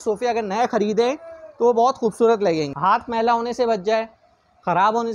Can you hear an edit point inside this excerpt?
yes; 1 cut; at 2.7 s

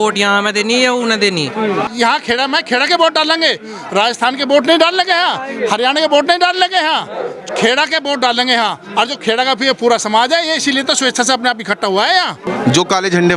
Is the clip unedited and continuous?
no; 2 cuts; at 1.9 s, 12.4 s

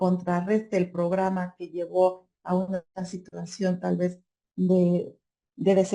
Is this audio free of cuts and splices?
yes; 0 cuts

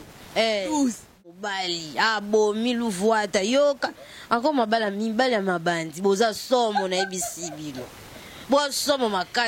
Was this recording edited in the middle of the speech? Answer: yes; 1 cut; at 1.3 s

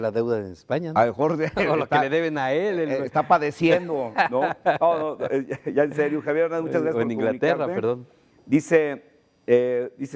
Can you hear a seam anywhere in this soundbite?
yes; 1 cut; at 2.9 s

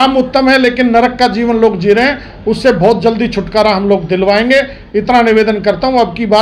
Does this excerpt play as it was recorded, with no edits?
yes; 0 cuts

